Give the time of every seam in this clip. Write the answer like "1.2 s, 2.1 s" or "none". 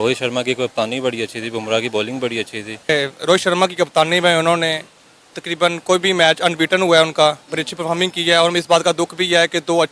2.7 s